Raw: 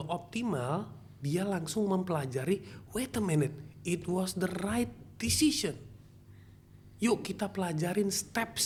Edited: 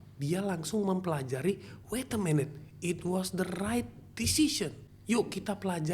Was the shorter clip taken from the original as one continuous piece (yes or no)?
no